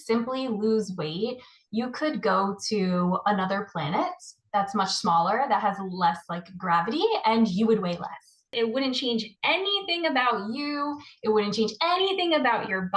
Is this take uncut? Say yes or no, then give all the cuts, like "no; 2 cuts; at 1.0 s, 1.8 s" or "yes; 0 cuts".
no; 1 cut; at 8.5 s